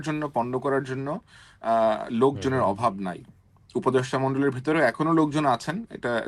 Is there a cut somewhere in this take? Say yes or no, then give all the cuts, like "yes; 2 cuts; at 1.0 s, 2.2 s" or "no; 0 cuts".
no; 0 cuts